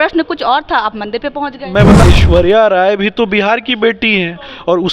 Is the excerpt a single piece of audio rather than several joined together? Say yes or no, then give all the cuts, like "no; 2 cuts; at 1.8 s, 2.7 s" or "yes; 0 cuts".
no; 1 cut; at 2.0 s